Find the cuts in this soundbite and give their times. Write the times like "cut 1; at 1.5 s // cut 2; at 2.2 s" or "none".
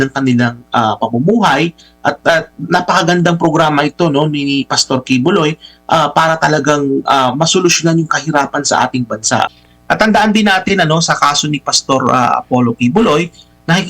cut 1; at 9.5 s